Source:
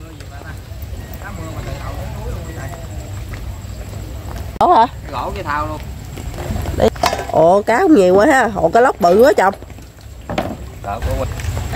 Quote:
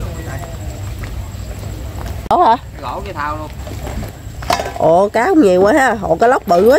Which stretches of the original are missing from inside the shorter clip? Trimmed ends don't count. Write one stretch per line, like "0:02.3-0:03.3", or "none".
0:06.7-0:07.0